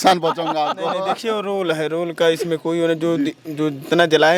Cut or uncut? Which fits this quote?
uncut